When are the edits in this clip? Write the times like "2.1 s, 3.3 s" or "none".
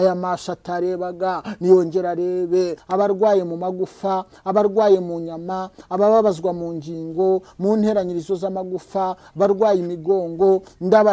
2.8 s